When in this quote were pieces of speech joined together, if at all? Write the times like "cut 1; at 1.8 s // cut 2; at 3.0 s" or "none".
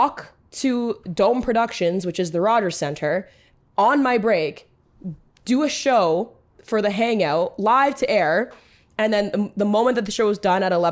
none